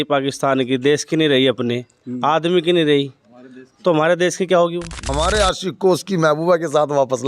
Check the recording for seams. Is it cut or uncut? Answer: cut